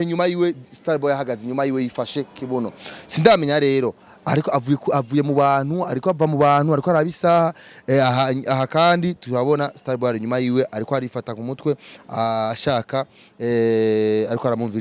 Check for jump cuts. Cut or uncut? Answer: uncut